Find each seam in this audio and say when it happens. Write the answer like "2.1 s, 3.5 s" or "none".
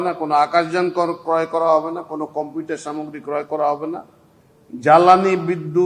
4.3 s